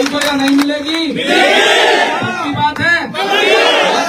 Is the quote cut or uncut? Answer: uncut